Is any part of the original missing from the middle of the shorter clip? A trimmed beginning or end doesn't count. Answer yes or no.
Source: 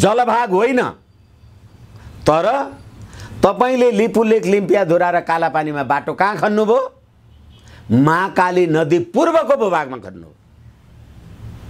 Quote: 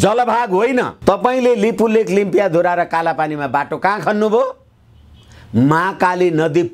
yes